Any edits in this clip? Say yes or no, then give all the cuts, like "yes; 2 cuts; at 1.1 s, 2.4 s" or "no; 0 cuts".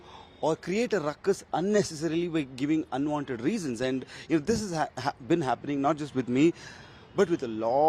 no; 0 cuts